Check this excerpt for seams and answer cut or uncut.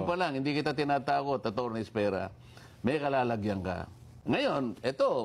cut